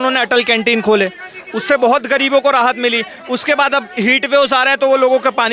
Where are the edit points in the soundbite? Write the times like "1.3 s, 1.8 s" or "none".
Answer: none